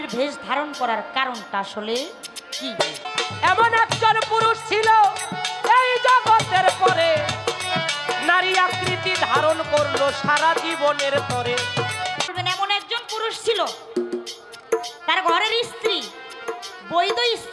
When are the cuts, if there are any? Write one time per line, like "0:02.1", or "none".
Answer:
0:03.0
0:12.3